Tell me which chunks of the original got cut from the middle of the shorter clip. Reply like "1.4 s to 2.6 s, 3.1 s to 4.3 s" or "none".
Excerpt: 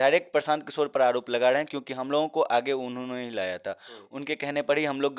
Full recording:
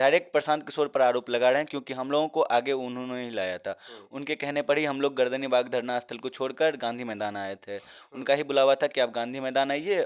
none